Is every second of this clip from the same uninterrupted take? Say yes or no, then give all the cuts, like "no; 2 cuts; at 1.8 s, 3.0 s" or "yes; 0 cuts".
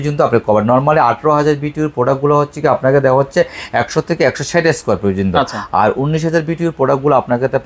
yes; 0 cuts